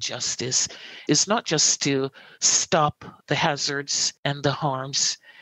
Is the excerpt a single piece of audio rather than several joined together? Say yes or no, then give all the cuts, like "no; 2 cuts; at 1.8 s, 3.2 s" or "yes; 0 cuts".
no; 1 cut; at 1.0 s